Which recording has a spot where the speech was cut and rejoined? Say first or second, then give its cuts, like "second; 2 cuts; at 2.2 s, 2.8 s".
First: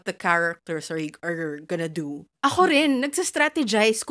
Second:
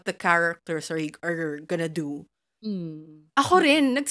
first; 1 cut; at 2.3 s